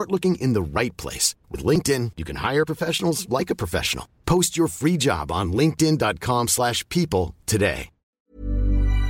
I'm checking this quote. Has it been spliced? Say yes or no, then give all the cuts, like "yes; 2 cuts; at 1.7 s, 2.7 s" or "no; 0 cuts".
yes; 1 cut; at 8.1 s